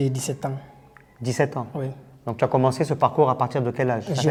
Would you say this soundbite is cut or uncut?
uncut